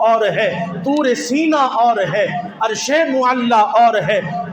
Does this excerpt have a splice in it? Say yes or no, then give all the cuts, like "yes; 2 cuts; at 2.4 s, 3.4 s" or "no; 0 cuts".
no; 0 cuts